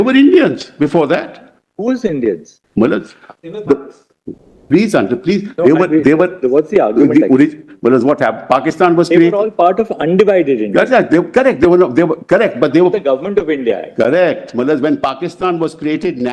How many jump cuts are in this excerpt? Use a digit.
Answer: 1